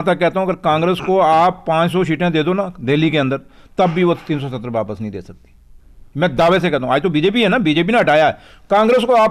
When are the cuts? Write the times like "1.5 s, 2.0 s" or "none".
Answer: none

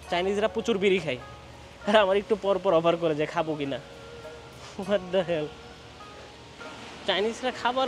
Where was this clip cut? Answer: 6.6 s

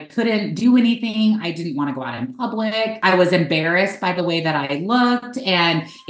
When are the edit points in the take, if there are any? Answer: 3.0 s

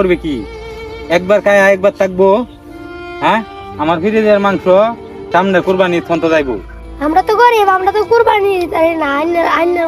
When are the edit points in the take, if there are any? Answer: 5.1 s

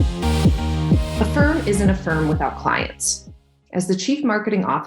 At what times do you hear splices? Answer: 1.3 s

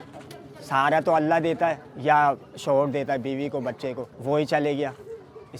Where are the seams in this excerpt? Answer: 1.9 s, 4.1 s

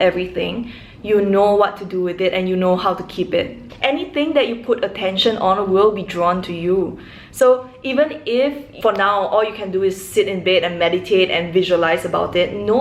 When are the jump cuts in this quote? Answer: 3.6 s, 8.7 s

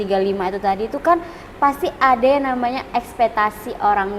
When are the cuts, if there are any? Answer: none

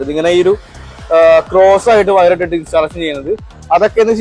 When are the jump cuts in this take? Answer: none

